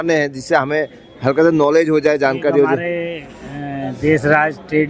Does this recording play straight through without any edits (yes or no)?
yes